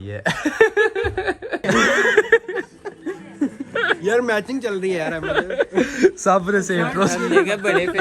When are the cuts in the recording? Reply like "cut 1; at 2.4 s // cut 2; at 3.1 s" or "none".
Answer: cut 1; at 1.6 s